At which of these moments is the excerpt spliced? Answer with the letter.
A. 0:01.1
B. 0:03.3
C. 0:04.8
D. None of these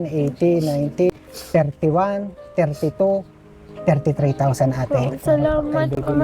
A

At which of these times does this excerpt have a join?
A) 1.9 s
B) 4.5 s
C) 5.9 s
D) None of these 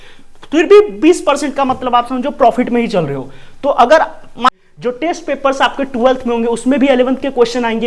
B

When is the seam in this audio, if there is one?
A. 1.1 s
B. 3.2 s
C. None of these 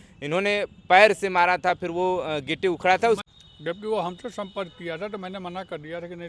B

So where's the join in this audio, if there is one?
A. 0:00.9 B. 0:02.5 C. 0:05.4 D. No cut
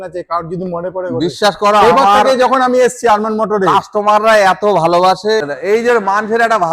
C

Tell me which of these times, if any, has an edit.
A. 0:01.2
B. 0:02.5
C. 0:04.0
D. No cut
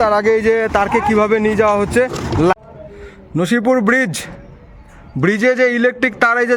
B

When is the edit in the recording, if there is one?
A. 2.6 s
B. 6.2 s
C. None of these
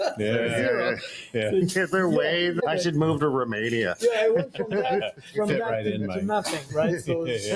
A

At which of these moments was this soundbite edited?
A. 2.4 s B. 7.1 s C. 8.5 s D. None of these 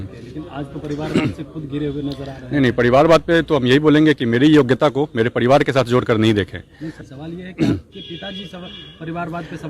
B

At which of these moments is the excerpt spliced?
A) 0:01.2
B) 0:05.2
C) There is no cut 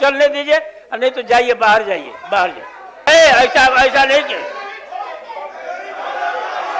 C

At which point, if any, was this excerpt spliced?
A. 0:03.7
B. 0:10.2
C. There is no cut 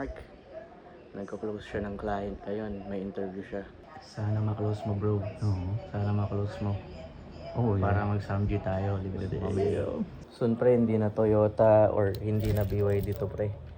B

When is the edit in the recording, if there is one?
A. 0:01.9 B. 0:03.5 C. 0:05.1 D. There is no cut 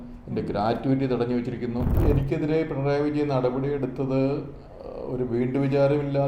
A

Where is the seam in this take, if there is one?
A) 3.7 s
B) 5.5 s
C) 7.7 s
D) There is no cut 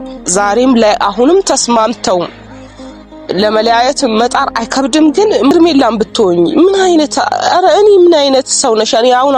B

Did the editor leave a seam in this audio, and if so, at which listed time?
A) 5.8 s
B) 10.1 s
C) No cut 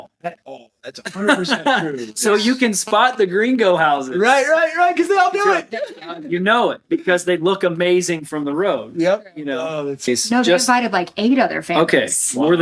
B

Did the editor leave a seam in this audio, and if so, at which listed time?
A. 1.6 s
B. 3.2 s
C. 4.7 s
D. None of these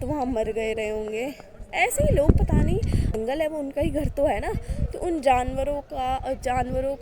B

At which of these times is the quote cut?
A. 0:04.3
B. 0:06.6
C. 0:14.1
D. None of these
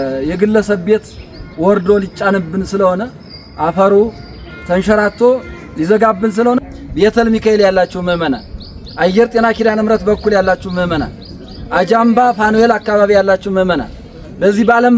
B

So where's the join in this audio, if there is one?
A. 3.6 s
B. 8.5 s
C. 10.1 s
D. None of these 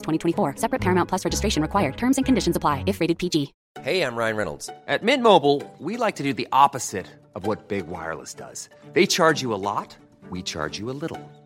A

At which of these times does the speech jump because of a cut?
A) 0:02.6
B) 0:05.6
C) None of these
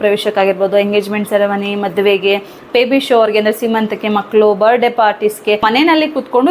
B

